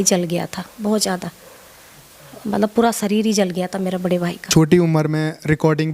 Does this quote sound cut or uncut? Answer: cut